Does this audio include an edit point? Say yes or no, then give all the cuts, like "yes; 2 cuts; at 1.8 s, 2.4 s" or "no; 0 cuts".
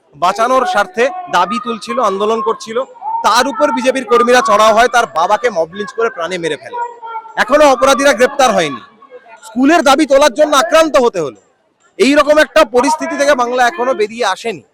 no; 0 cuts